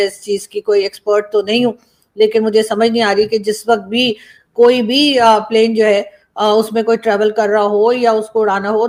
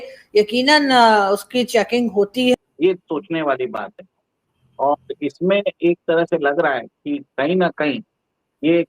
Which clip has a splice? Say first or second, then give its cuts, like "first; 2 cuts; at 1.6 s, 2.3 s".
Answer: second; 1 cut; at 2.5 s